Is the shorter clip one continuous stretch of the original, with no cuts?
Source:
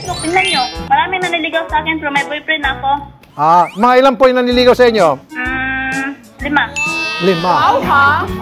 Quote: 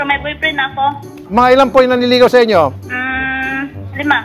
no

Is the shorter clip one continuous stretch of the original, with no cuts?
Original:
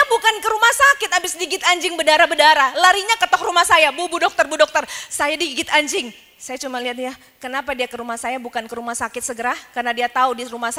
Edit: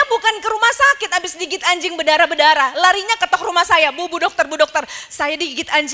yes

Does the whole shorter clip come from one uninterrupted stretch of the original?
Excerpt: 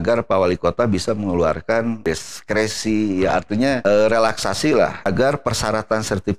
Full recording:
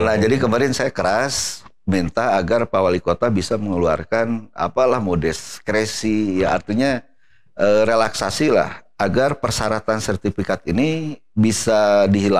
no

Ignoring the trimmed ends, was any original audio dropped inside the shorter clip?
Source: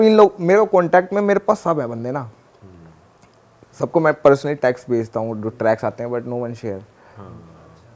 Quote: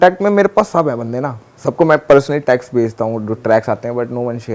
yes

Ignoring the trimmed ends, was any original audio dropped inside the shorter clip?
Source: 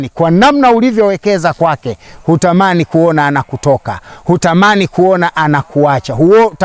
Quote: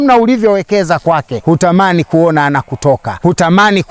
yes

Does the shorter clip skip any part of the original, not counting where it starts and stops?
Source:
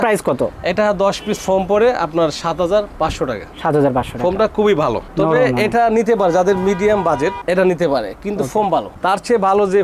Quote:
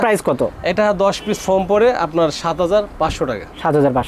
no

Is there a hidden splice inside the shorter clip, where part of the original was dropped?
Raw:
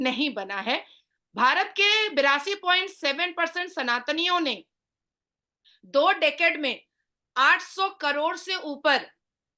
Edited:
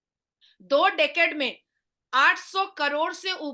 no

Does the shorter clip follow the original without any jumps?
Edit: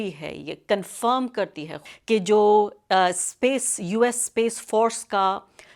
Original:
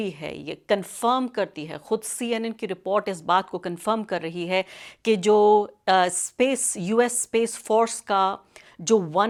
no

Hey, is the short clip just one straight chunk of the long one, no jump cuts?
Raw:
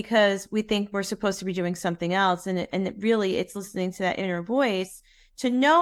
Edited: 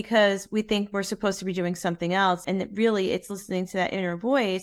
no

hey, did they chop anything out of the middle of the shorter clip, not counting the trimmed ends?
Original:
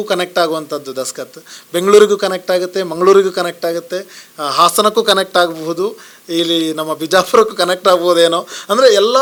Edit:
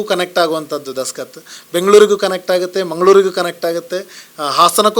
no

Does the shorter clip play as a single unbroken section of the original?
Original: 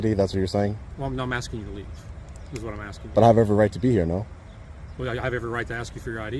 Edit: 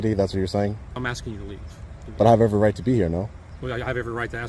no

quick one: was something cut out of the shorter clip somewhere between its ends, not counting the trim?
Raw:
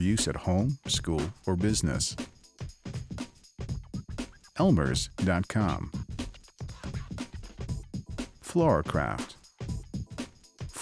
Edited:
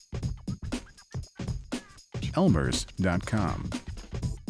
yes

